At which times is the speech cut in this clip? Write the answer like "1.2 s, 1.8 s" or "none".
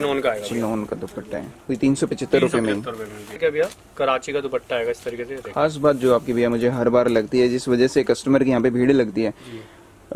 3.4 s